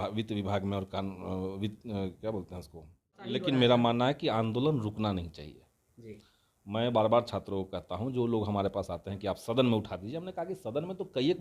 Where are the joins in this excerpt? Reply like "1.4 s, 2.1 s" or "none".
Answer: 3.3 s